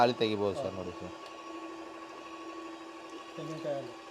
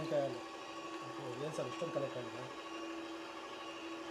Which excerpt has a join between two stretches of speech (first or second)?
first